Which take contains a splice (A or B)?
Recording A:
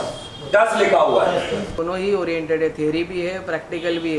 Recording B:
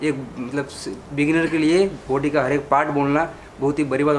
A